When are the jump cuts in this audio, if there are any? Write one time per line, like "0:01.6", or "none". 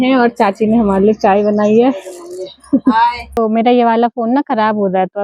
0:03.3

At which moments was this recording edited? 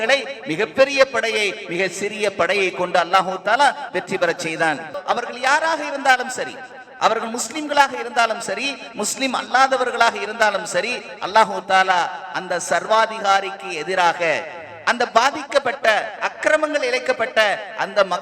0:05.0

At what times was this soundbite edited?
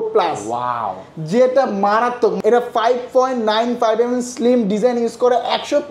0:02.4

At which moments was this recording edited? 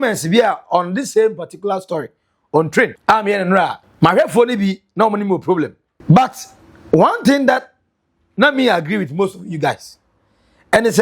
0:03.0
0:03.8
0:05.9

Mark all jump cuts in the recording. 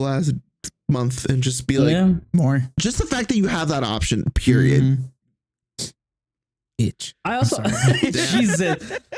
0:02.8

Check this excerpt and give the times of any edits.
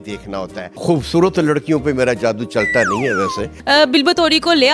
0:00.8
0:03.4

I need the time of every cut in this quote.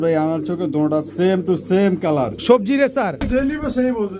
0:03.3

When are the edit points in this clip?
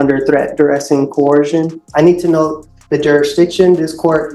0:01.8

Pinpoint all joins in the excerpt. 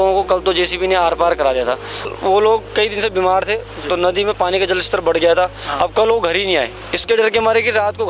0:02.1

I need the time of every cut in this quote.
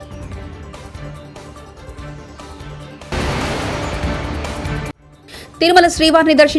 none

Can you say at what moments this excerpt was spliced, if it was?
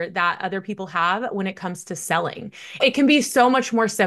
0:02.8

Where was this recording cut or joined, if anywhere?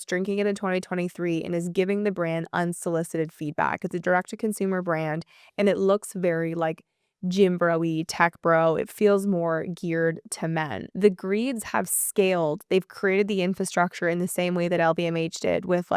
0:10.8

